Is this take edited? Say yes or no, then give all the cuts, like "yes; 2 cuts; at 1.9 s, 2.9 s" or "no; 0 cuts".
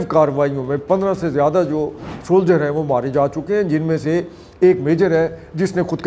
no; 0 cuts